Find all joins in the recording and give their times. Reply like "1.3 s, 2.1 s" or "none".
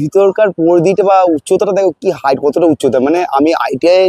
none